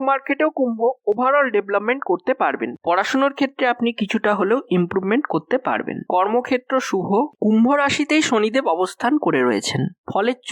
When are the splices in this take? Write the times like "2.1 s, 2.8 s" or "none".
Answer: 2.8 s, 7.3 s